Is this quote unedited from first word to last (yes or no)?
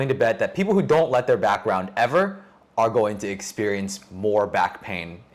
yes